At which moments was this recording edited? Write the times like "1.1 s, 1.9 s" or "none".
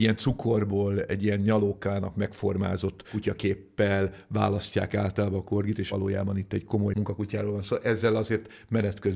5.9 s, 6.9 s